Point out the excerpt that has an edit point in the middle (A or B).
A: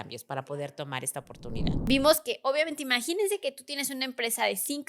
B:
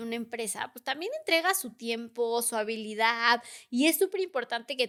A